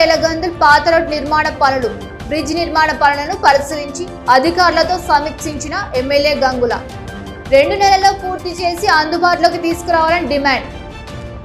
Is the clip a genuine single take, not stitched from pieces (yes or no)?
yes